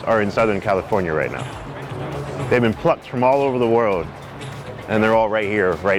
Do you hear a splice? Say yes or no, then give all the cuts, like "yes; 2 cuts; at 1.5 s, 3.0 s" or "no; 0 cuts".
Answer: no; 0 cuts